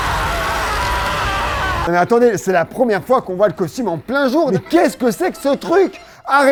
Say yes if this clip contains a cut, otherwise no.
no